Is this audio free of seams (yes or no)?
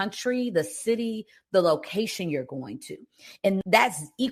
yes